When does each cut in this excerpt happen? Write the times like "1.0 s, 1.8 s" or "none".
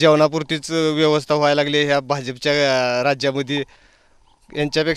none